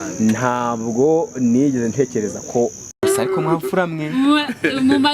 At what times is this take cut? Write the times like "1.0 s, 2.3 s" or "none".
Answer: 3.0 s